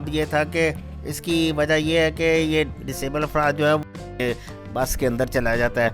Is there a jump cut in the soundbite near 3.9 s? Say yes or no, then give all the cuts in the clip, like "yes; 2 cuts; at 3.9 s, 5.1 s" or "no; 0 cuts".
yes; 1 cut; at 3.9 s